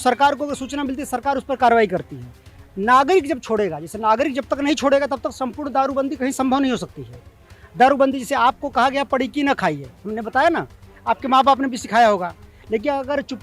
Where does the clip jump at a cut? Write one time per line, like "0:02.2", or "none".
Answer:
none